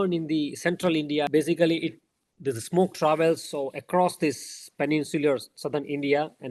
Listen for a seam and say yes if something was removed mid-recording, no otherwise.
yes